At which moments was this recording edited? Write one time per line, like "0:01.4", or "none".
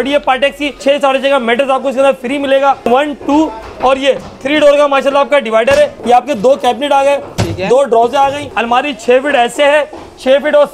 0:00.8
0:02.9
0:06.0
0:08.5